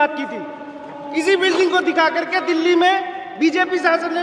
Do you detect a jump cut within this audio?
no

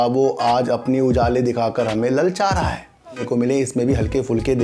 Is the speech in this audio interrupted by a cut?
yes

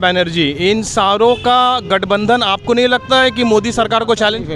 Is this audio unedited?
yes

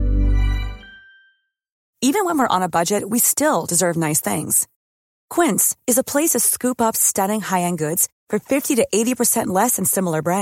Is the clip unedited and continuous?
no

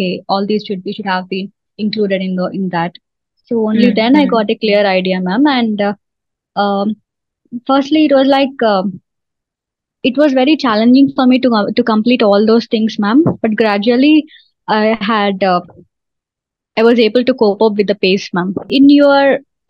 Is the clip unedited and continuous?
no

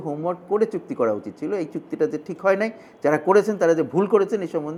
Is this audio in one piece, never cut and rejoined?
yes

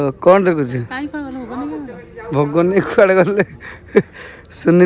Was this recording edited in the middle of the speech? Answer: no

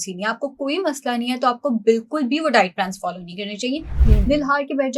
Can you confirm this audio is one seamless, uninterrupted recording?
no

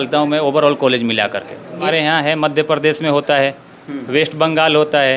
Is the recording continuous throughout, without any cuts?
no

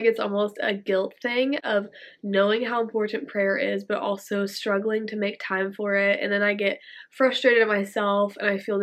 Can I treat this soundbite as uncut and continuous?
yes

